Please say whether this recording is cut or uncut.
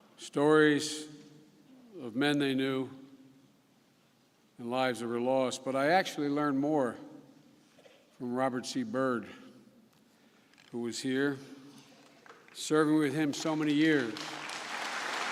uncut